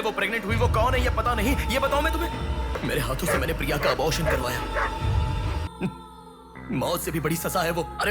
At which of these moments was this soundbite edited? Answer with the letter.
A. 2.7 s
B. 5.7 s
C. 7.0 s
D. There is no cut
A